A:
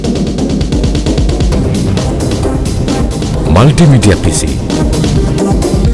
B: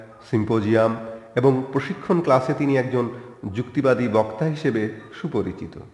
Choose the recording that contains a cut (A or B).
B